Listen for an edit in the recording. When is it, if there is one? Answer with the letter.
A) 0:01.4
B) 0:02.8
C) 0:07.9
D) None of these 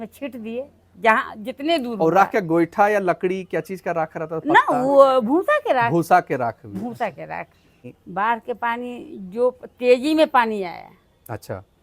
C